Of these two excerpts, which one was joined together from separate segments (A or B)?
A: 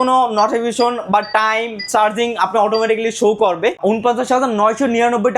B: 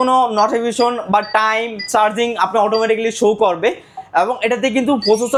A